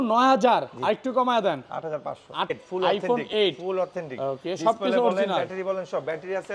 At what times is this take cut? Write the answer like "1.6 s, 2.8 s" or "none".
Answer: 2.5 s